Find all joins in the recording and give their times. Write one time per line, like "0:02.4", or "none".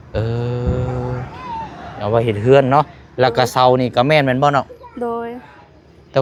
none

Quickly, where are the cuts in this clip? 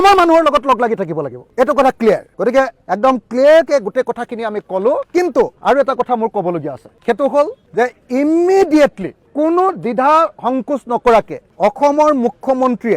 none

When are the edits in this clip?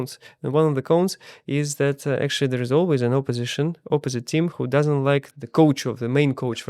0:05.3

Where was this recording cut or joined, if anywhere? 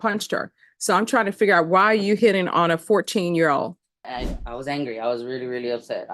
0:04.1

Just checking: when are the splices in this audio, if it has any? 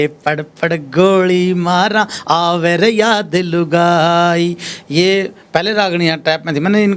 none

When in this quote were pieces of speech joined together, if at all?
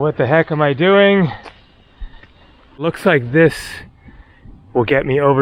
0:02.9

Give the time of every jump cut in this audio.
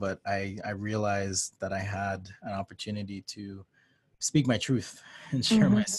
none

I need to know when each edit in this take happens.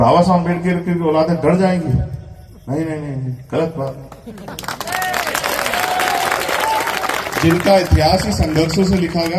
none

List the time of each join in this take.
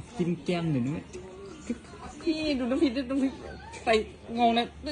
0:02.4

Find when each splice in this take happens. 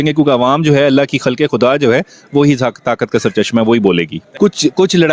0:04.2

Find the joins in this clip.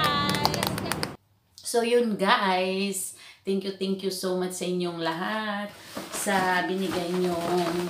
0:01.1

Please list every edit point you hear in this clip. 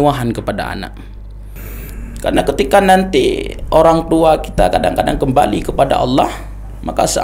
0:01.6

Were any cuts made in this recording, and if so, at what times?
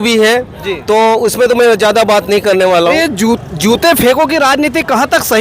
0:02.9

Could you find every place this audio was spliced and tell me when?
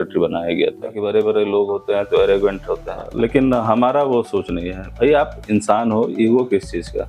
0:01.0
0:03.0

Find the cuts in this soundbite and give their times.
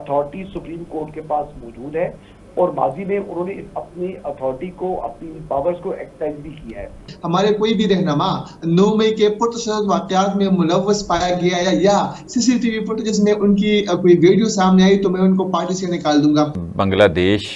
0:07.1
0:16.6

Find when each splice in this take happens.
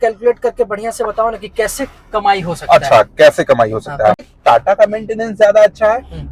0:04.2

